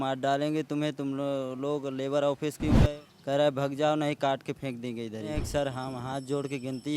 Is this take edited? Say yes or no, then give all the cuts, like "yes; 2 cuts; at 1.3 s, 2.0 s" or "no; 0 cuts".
yes; 2 cuts; at 2.8 s, 5.4 s